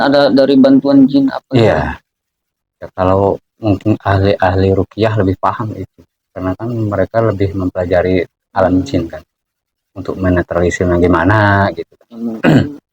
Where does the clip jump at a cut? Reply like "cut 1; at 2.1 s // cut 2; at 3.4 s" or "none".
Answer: none

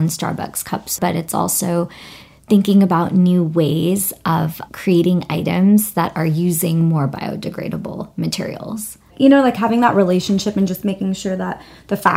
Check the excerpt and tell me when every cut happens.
cut 1; at 1.0 s // cut 2; at 9.1 s

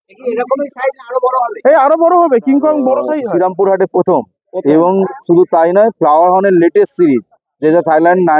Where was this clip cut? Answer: cut 1; at 3.2 s

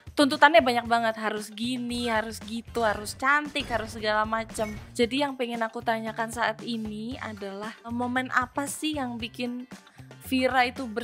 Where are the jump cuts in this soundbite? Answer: cut 1; at 4.8 s // cut 2; at 7.9 s

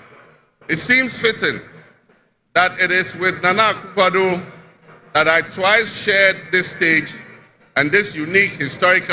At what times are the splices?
none

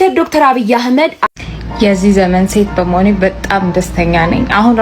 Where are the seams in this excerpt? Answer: cut 1; at 1.3 s

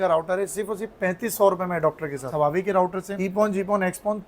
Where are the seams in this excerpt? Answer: cut 1; at 2.3 s // cut 2; at 3.1 s

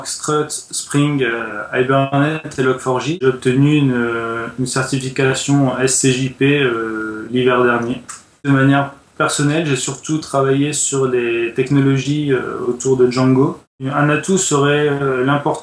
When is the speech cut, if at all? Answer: cut 1; at 3.2 s // cut 2; at 8.4 s // cut 3; at 13.7 s

